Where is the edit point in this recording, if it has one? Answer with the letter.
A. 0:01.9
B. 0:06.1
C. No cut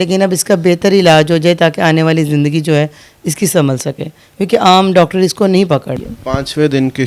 B